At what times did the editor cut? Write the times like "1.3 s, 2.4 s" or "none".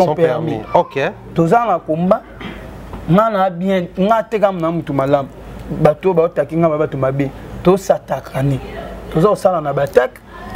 none